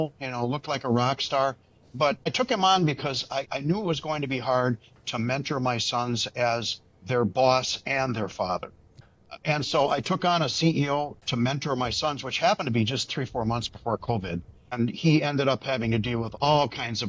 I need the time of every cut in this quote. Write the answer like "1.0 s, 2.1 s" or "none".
2.3 s, 3.5 s, 9.0 s, 11.3 s, 14.7 s